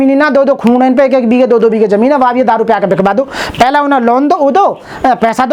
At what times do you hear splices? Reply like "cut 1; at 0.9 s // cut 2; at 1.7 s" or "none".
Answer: none